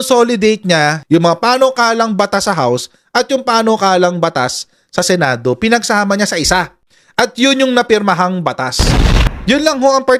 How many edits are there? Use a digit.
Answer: 2